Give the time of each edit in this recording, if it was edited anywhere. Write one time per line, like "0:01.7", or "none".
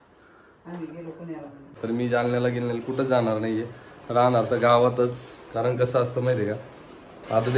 0:01.7